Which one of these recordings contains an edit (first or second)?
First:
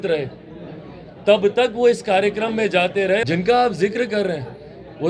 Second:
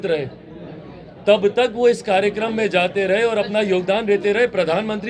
first